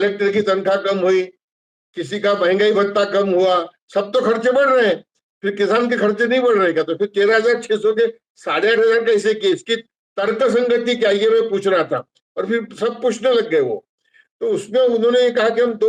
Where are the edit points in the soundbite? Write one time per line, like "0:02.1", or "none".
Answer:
none